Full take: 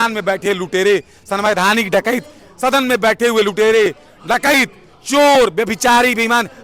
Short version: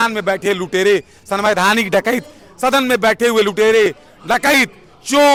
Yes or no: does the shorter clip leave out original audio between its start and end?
no